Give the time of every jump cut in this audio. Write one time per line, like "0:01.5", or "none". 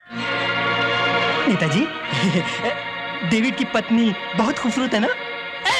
0:01.4